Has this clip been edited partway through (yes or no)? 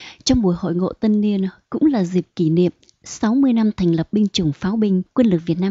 no